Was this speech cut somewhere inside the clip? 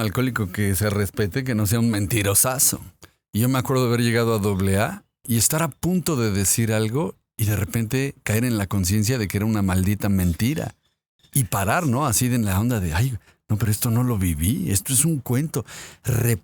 no; 0 cuts

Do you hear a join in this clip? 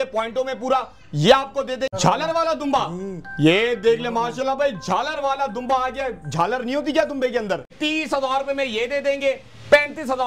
yes; 2 cuts; at 1.9 s, 7.7 s

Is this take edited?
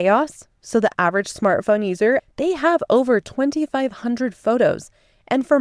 yes; 1 cut; at 2.2 s

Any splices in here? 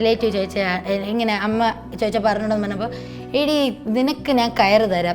no; 0 cuts

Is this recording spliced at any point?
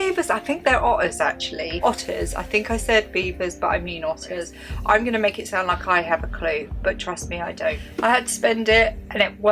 yes; 2 cuts; at 4.5 s, 7.9 s

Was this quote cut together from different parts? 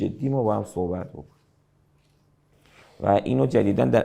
no; 0 cuts

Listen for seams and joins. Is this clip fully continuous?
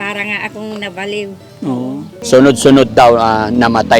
no; 1 cut; at 2.1 s

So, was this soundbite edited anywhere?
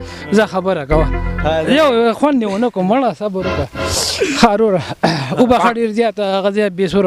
no; 0 cuts

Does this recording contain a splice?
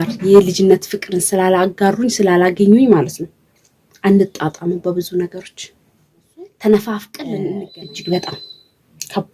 yes; 1 cut; at 7.5 s

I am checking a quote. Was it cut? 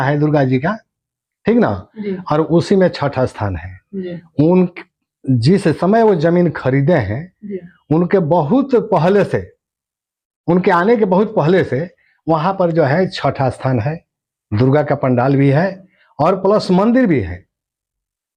no; 0 cuts

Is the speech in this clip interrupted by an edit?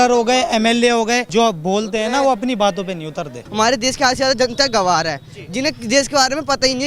yes; 2 cuts; at 1.2 s, 3.4 s

